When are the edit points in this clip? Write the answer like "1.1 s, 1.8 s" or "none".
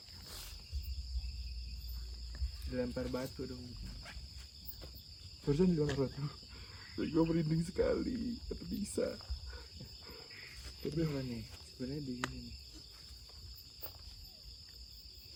none